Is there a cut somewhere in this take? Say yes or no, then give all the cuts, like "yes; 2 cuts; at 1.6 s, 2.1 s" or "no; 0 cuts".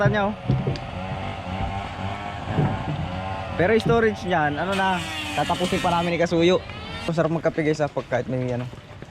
yes; 1 cut; at 7.1 s